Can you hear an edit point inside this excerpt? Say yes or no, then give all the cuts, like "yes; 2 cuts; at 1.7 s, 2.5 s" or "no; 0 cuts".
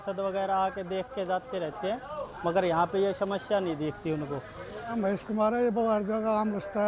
yes; 1 cut; at 4.9 s